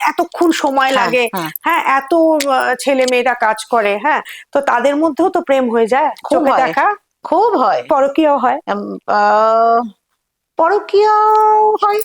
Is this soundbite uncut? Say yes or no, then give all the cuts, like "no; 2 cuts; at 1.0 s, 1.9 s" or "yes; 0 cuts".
yes; 0 cuts